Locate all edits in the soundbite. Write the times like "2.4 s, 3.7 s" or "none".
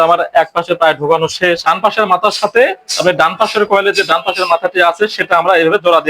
1.6 s